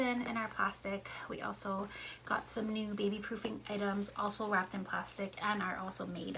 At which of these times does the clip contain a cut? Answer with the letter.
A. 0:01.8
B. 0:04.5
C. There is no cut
C